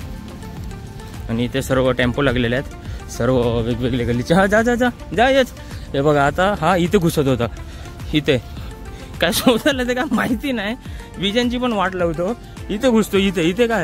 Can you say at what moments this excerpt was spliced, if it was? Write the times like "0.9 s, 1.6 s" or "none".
none